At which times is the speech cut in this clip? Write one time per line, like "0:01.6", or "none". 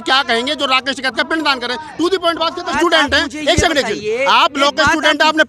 0:02.7